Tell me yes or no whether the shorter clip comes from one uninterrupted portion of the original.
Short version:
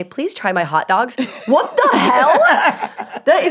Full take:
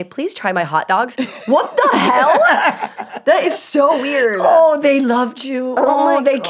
yes